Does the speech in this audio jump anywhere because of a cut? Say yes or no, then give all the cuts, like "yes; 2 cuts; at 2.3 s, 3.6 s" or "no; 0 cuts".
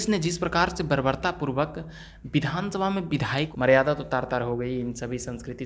yes; 1 cut; at 3.5 s